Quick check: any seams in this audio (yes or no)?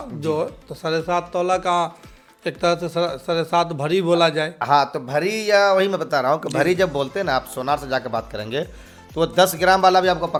no